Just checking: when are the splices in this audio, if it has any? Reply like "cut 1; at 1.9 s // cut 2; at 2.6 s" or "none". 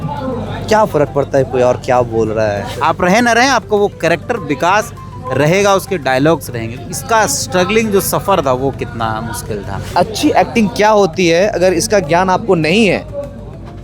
cut 1; at 2.7 s // cut 2; at 9.8 s